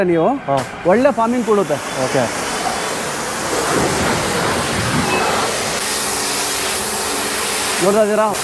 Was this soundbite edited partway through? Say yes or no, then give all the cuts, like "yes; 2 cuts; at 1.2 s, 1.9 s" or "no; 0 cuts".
no; 0 cuts